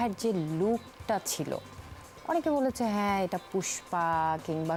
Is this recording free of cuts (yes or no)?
yes